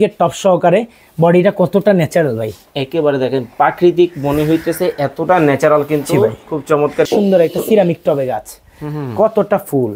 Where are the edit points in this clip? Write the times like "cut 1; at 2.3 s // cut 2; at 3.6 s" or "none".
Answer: cut 1; at 7.0 s

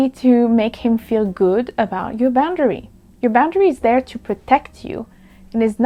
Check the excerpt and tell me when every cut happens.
none

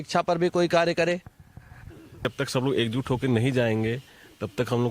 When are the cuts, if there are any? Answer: cut 1; at 2.2 s

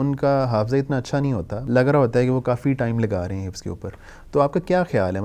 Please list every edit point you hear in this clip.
cut 1; at 1.5 s

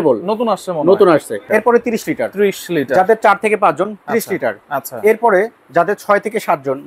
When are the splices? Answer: cut 1; at 1.4 s

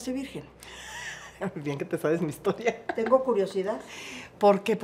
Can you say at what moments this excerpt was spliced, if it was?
none

